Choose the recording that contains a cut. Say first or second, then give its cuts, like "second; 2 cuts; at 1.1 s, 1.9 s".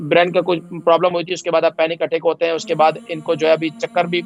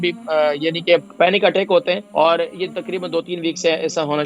second; 2 cuts; at 1.1 s, 2.1 s